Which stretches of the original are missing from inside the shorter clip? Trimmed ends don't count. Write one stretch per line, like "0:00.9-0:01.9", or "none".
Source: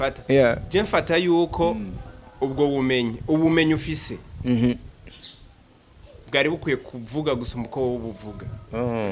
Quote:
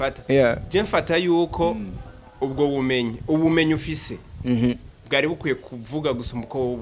0:04.9-0:06.1

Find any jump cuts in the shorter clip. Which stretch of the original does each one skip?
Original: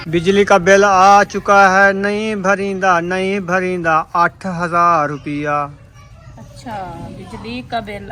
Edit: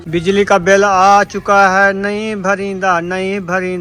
none

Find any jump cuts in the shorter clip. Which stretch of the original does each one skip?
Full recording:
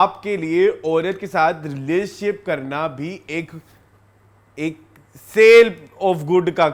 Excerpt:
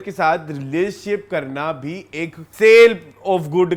0:03.6-0:05.2

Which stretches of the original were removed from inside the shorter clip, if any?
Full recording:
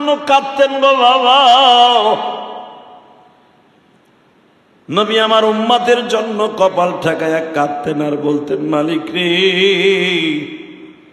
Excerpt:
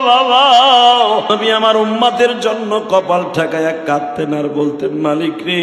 0:02.2-0:04.9

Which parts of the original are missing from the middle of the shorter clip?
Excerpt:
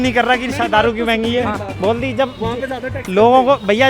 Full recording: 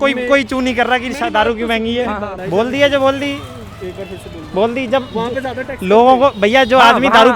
0:02.3-0:04.4

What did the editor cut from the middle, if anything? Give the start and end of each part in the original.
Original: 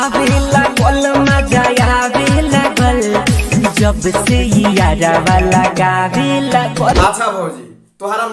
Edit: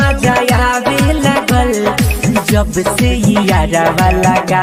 none

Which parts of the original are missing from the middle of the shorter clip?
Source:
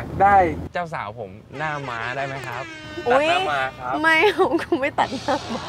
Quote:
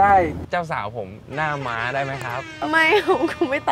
0:02.7-0:03.8

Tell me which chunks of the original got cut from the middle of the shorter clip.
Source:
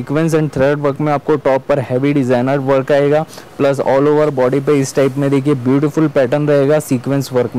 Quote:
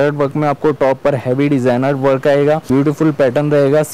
0:03.3-0:05.6

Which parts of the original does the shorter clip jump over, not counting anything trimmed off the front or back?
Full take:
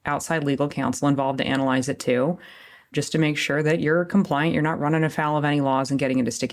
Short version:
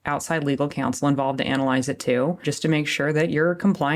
0:02.5-0:03.0

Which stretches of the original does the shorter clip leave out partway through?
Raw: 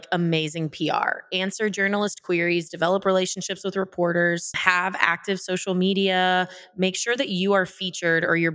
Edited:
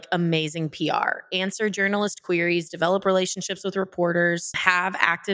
none

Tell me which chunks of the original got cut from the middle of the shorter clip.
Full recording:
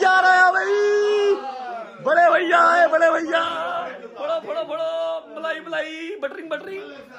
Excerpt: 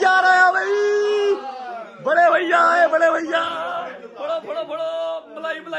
none

